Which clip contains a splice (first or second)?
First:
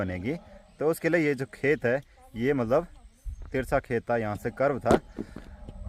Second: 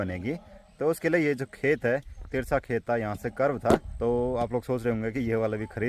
second